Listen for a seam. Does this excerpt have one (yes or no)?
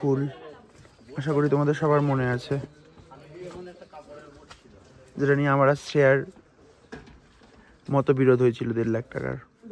no